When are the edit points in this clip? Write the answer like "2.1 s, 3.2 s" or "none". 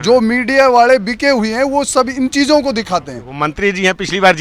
3.2 s